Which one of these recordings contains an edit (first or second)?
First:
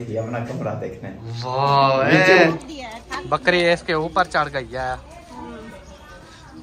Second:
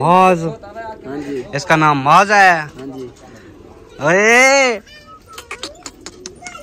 first